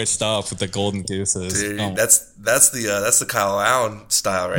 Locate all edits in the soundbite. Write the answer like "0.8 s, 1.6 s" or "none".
none